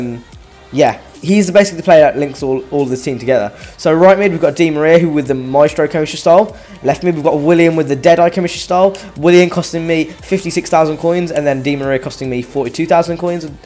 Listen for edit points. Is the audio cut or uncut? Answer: cut